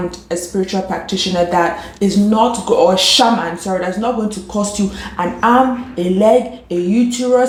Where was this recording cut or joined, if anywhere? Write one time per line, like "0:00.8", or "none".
none